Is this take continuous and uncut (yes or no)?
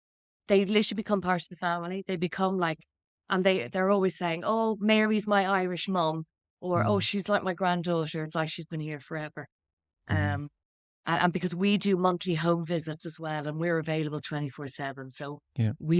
yes